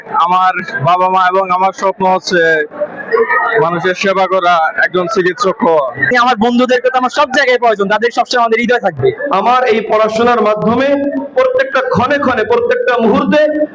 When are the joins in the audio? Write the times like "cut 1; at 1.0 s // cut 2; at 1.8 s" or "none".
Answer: cut 1; at 6.1 s // cut 2; at 9.2 s